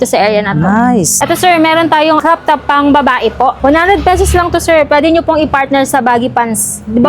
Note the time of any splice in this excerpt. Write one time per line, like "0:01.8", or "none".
0:01.1
0:02.2
0:03.6